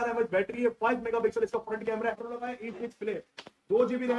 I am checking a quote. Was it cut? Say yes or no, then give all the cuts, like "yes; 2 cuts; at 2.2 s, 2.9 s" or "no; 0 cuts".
yes; 1 cut; at 2.3 s